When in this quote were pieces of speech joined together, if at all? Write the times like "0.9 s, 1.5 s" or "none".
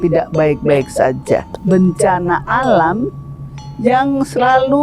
1.5 s